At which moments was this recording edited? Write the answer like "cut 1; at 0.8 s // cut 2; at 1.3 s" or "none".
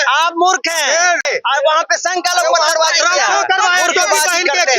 cut 1; at 1.3 s